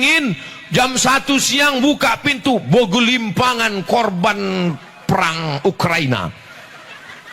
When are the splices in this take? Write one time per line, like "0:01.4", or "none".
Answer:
none